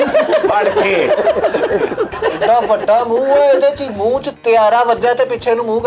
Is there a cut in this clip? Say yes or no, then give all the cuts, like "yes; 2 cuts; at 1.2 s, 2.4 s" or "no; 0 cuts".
yes; 1 cut; at 2.2 s